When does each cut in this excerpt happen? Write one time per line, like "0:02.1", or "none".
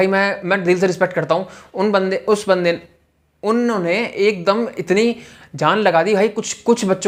none